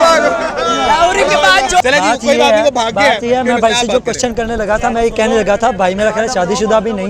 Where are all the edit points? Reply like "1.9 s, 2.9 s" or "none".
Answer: 1.8 s